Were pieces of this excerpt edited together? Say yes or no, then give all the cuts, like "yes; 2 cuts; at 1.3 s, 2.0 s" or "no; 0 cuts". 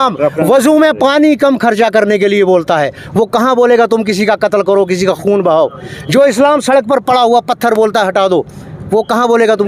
no; 0 cuts